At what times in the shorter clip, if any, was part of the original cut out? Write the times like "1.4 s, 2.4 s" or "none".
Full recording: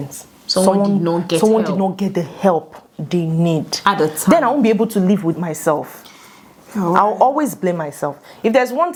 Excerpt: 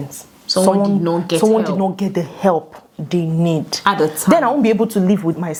none